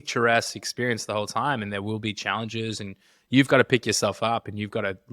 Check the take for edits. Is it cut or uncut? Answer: cut